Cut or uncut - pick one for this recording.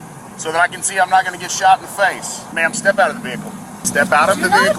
cut